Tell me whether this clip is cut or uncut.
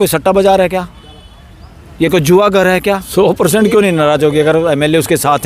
cut